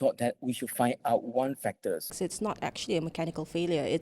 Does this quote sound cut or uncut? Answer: cut